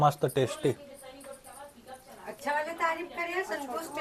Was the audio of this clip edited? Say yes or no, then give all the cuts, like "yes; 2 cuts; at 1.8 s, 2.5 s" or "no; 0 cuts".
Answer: no; 0 cuts